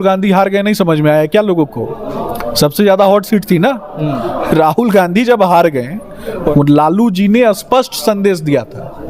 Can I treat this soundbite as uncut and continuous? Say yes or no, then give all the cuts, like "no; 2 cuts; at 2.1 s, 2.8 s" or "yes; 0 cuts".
no; 1 cut; at 6.5 s